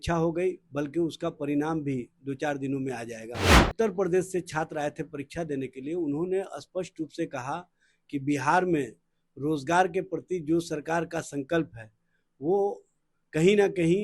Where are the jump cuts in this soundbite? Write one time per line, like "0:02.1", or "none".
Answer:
0:03.6